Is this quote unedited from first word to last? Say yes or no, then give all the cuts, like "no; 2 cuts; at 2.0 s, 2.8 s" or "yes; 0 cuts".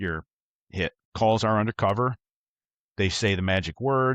no; 1 cut; at 1.0 s